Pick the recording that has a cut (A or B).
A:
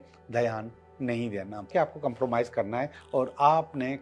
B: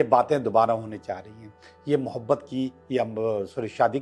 A